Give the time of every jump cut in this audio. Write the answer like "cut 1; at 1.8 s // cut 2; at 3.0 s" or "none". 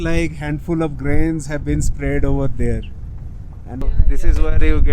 cut 1; at 3.8 s

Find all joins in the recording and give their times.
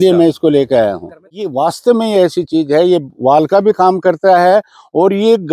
cut 1; at 1.5 s

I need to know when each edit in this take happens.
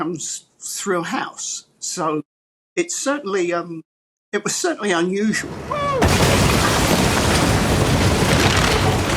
cut 1; at 5.5 s

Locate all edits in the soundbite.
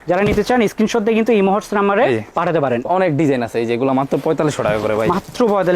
cut 1; at 2.8 s

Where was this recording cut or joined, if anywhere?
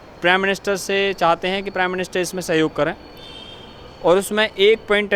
none

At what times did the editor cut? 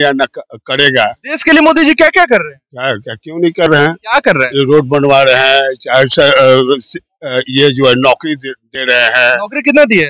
none

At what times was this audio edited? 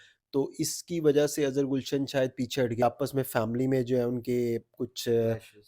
cut 1; at 2.8 s

